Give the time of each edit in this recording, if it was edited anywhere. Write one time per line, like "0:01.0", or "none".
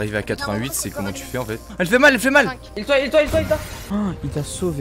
0:01.6
0:02.7
0:03.7